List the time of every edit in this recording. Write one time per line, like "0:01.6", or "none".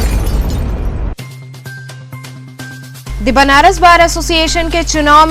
0:02.9